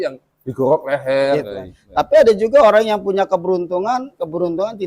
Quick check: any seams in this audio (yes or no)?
yes